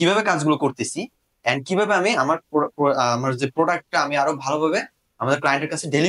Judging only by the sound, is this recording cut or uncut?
uncut